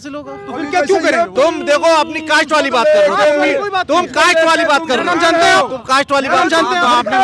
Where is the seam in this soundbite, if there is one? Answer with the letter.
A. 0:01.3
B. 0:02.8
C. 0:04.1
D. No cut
A